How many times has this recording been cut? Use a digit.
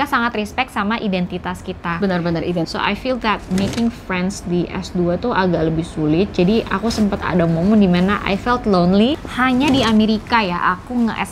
2